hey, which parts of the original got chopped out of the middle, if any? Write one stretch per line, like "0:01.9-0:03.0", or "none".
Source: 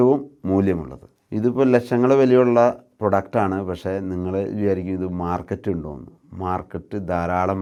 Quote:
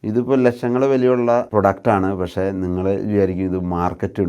0:02.8-0:03.0